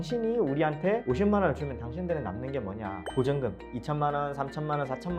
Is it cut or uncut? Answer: cut